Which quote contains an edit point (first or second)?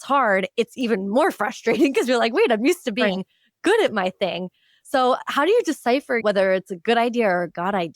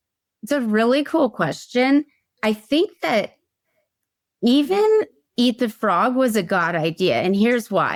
first